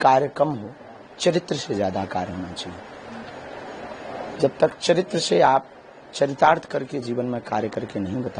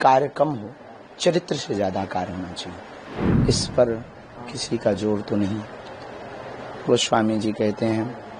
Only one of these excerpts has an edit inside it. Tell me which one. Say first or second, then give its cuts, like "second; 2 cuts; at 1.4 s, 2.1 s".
second; 1 cut; at 3.1 s